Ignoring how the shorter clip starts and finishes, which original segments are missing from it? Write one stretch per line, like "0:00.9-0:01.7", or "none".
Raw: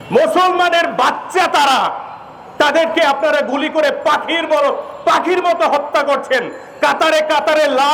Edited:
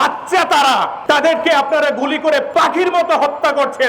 0:02.0-0:02.4
0:04.0-0:05.0